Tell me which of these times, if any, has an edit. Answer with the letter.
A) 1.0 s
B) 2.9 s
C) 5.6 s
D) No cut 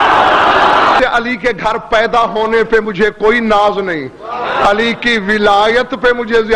A